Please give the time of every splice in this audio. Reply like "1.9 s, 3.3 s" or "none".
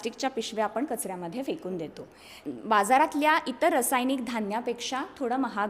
2.3 s